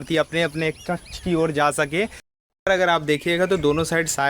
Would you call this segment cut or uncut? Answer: cut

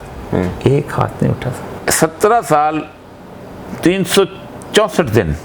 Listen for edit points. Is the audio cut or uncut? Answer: cut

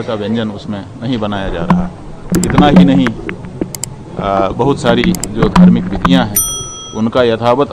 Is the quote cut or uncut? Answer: cut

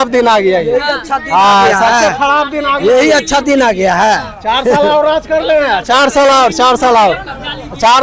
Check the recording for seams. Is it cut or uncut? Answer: uncut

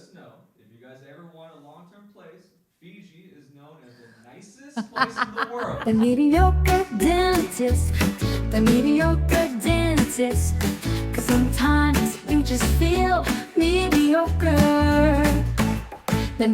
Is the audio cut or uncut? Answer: cut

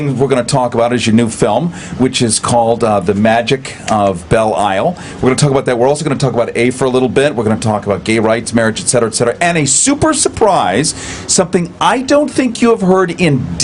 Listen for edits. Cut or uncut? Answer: uncut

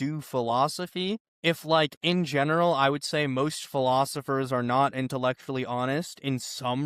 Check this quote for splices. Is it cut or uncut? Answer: cut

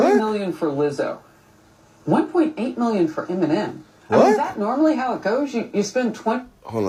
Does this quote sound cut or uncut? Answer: uncut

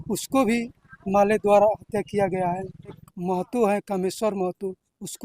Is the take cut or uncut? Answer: cut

